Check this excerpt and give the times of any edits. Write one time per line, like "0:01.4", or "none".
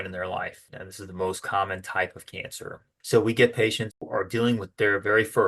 0:04.0